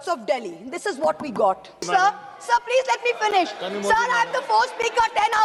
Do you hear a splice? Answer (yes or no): yes